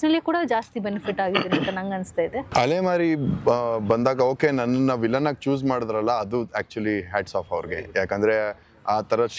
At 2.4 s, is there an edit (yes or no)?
yes